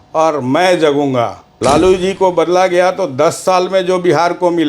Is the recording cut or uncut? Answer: cut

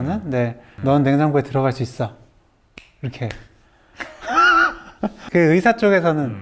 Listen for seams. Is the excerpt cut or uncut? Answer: cut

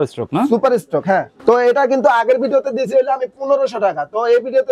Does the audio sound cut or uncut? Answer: cut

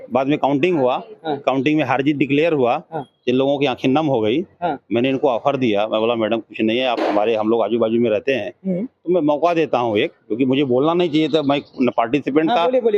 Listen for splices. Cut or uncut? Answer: uncut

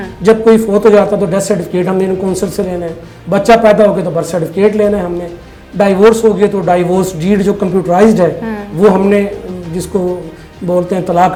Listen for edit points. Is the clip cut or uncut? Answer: uncut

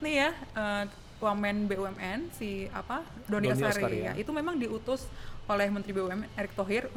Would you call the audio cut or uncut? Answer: uncut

